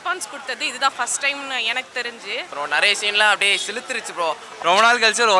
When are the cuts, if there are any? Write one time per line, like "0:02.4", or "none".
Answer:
0:02.5
0:04.5